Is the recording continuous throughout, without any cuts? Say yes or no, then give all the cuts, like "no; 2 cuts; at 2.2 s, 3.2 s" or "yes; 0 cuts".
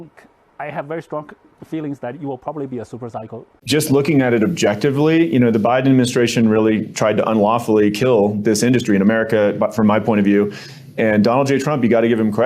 no; 1 cut; at 3.5 s